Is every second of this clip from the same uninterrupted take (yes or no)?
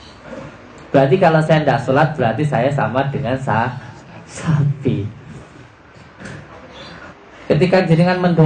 no